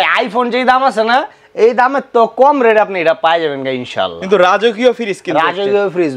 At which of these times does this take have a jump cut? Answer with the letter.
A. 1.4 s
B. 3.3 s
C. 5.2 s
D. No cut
D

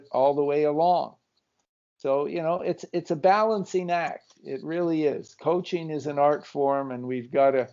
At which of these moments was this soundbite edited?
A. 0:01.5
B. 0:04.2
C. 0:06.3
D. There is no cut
D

